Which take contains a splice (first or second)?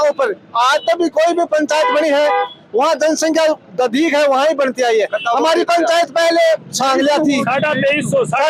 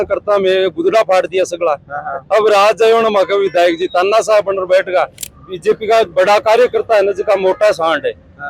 second